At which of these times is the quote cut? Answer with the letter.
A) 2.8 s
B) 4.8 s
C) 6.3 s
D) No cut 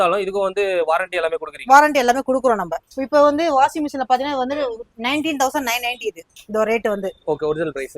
A